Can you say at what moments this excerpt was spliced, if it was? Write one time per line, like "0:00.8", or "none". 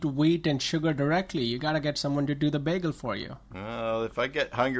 0:03.7